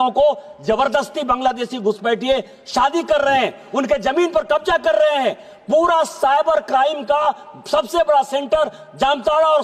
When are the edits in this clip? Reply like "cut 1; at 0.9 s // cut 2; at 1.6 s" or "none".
none